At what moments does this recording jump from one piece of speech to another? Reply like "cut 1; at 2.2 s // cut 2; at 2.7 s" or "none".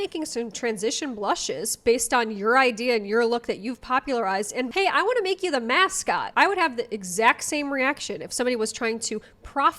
cut 1; at 6.3 s